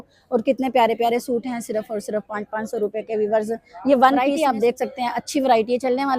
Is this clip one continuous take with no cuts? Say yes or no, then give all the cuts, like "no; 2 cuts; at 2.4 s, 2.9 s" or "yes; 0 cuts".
no; 1 cut; at 4.3 s